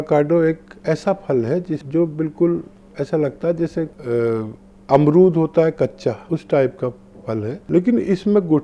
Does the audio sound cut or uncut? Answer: cut